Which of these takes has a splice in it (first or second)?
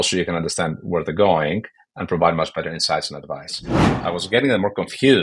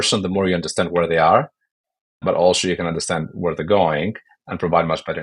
first